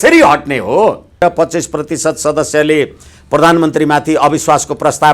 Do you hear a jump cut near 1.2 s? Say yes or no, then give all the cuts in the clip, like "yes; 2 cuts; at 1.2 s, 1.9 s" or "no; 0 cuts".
yes; 1 cut; at 1.2 s